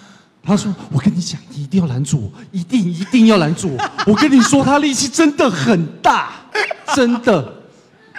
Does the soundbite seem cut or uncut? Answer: uncut